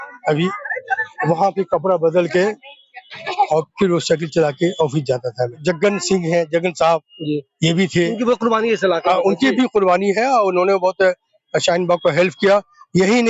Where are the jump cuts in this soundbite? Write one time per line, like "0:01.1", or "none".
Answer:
0:05.6